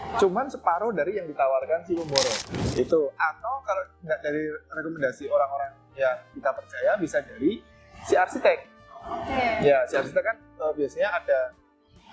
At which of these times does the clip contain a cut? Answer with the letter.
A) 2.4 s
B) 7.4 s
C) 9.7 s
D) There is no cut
A